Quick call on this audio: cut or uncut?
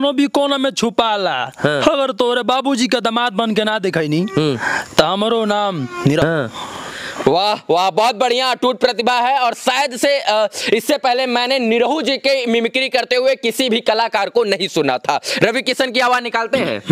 uncut